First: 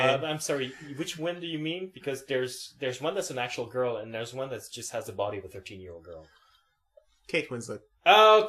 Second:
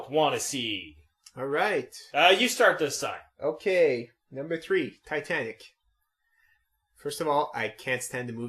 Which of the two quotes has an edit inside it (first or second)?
second